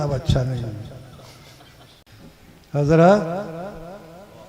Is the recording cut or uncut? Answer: cut